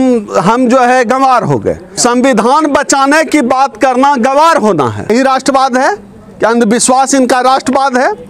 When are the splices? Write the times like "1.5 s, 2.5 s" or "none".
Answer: 1.9 s, 5.1 s

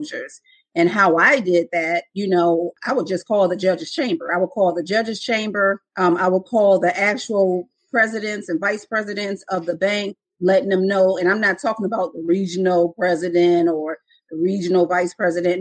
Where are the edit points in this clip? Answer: 2.7 s, 5.9 s

